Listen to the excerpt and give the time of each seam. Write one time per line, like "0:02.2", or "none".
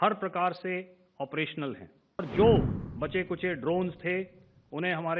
0:02.2